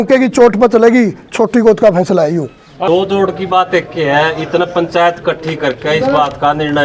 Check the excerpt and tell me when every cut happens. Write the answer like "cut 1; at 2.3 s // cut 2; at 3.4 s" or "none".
cut 1; at 2.7 s

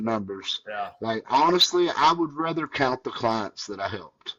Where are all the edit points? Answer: none

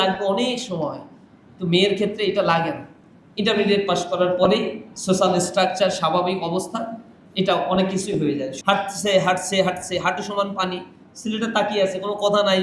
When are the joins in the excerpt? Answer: cut 1; at 8.5 s

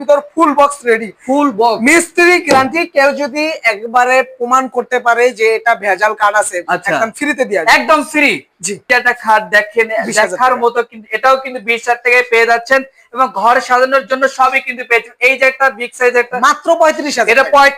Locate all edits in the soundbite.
none

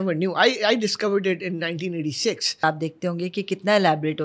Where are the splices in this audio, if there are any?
cut 1; at 2.6 s

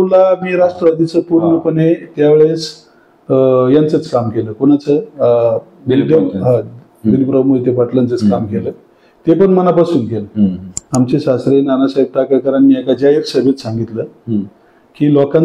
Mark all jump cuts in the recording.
cut 1; at 10.8 s

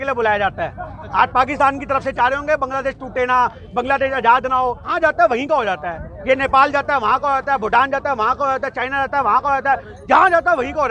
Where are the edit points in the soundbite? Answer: cut 1; at 4.9 s

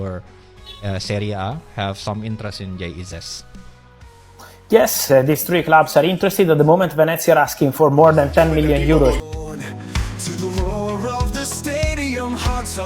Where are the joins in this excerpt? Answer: cut 1; at 5.1 s // cut 2; at 9.2 s

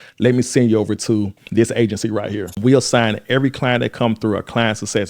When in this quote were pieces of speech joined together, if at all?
cut 1; at 2.4 s

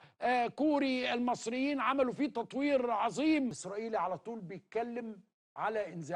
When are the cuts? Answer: cut 1; at 3.7 s

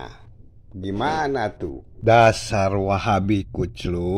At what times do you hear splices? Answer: cut 1; at 1.9 s

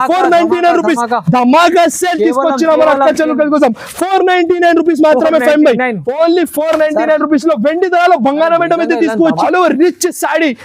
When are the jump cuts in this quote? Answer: cut 1; at 9.4 s

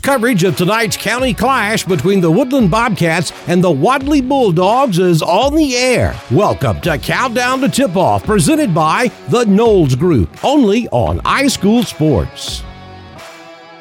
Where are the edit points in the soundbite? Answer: cut 1; at 12.3 s

